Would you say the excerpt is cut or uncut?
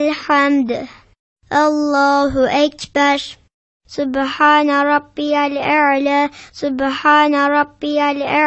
cut